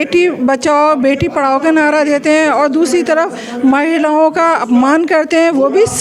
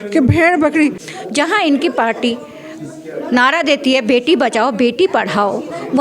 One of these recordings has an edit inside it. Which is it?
second; 1 cut; at 1.0 s

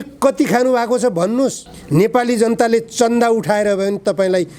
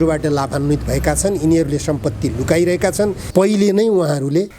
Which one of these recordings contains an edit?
second; 1 cut; at 3.2 s

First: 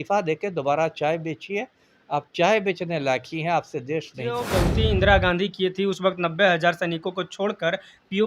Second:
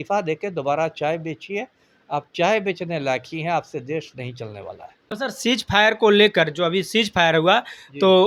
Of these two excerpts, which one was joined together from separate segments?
first; 1 cut; at 4.5 s

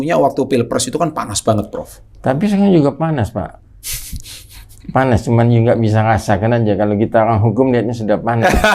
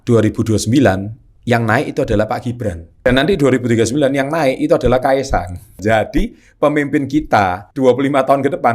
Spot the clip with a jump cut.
second; 3 cuts; at 2.9 s, 5.8 s, 7.6 s

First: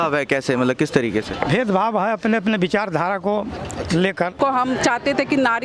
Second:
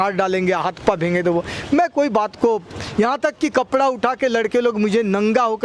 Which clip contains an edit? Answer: first; 1 cut; at 4.4 s

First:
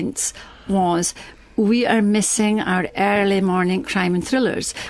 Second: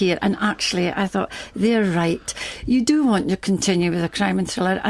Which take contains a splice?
second; 1 cut; at 2.4 s

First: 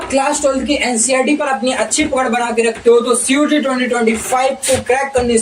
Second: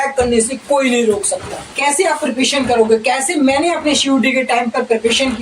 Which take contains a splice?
second; 1 cut; at 1.6 s

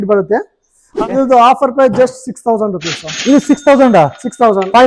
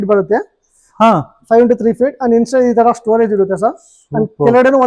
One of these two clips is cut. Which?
first; 1 cut; at 1.0 s

